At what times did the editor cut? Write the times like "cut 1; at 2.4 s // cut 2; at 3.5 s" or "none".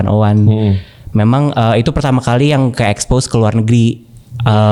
none